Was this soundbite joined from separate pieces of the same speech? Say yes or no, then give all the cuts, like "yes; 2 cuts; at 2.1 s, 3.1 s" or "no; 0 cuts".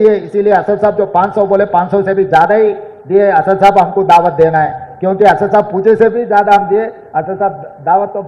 no; 0 cuts